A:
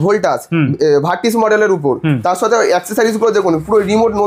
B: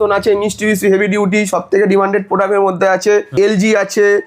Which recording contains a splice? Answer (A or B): B